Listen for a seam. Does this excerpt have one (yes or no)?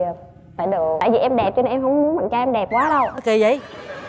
yes